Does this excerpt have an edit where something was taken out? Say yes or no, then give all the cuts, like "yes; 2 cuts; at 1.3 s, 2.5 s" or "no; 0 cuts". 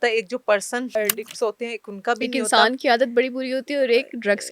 yes; 1 cut; at 0.9 s